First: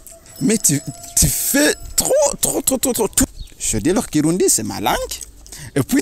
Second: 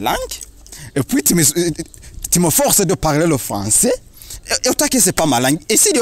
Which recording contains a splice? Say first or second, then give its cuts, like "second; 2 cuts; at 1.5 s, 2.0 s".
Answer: first; 1 cut; at 3.2 s